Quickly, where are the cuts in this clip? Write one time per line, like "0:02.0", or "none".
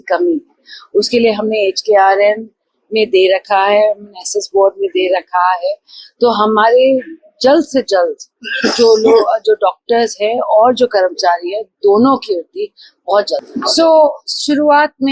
none